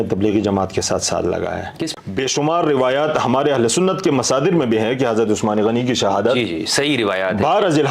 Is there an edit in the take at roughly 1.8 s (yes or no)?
yes